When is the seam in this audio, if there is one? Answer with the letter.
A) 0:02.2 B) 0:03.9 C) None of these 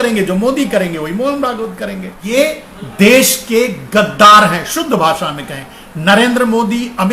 A